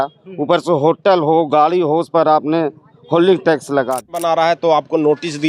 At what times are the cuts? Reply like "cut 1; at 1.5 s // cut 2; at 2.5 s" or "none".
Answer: cut 1; at 4.2 s